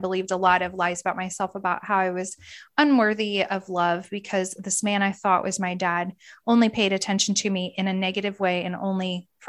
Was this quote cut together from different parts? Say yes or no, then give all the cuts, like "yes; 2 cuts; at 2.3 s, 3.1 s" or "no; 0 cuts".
no; 0 cuts